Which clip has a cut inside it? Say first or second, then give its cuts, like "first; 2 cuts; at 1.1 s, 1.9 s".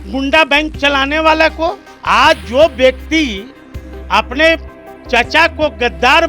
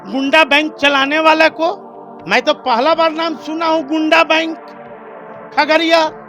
first; 1 cut; at 1.9 s